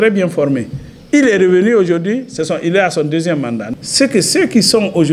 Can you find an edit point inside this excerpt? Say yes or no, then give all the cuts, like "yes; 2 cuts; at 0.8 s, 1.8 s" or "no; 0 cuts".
yes; 1 cut; at 3.7 s